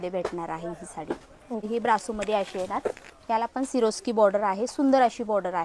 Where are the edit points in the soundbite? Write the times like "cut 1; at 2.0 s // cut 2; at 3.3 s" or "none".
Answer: cut 1; at 1.6 s